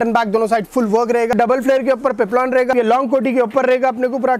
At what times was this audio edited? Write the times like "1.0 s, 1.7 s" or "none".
1.3 s, 2.7 s